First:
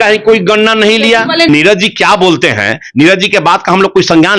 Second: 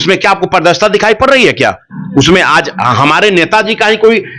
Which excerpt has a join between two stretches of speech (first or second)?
first